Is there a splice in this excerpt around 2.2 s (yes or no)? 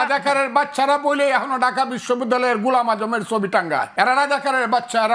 no